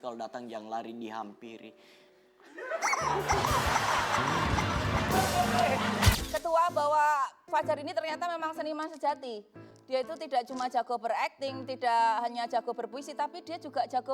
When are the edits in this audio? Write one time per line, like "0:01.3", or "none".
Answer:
0:06.1